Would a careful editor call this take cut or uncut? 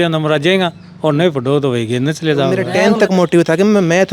cut